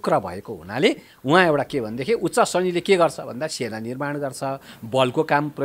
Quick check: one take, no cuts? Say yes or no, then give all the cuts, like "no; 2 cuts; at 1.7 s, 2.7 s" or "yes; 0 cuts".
yes; 0 cuts